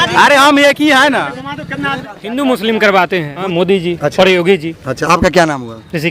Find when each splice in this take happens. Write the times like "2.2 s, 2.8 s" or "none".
2.0 s, 3.4 s